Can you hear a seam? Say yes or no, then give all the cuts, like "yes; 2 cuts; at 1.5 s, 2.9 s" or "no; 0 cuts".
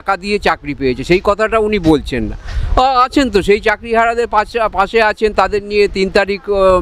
no; 0 cuts